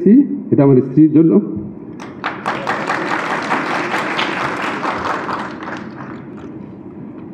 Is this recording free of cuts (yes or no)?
yes